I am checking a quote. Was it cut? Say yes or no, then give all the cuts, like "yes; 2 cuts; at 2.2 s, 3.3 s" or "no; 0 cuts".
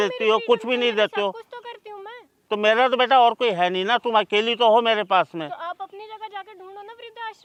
no; 0 cuts